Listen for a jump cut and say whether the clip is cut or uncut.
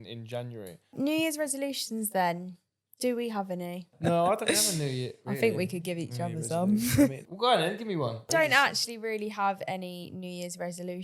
cut